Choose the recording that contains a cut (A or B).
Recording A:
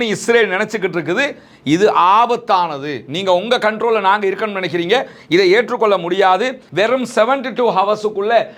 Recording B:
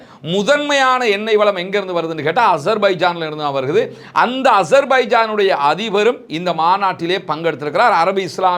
A